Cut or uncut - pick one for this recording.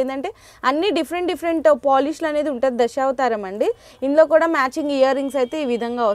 uncut